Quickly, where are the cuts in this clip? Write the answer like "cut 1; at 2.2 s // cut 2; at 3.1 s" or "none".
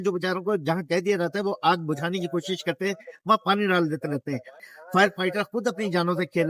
cut 1; at 4.6 s